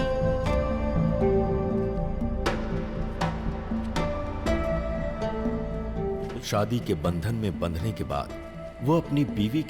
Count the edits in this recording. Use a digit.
1